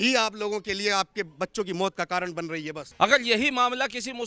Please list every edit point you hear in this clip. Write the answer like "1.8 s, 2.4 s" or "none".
2.8 s